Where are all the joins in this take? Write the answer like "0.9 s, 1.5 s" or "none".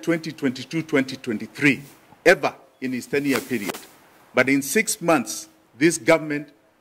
none